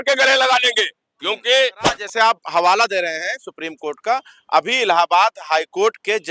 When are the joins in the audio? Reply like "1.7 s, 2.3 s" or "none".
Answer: 2.0 s